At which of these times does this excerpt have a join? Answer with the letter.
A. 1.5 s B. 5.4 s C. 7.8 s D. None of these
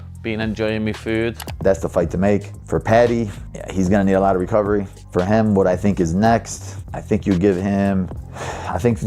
A